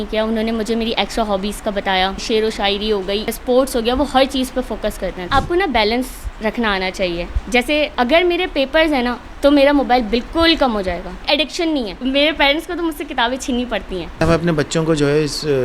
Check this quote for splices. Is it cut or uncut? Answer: cut